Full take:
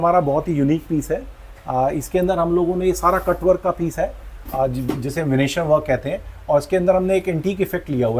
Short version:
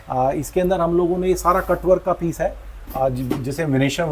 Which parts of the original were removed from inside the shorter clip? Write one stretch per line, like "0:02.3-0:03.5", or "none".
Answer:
none

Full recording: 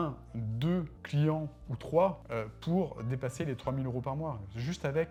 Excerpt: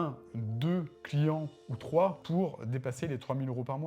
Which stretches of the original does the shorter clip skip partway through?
0:02.2-0:02.6

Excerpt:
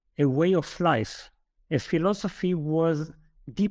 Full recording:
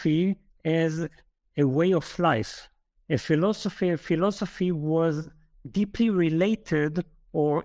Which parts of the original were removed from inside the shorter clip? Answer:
0:03.2-0:04.0

